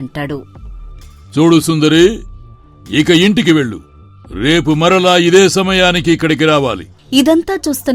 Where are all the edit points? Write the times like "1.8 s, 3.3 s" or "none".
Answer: 6.9 s